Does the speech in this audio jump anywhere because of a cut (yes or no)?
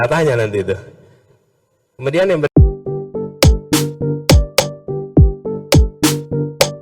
yes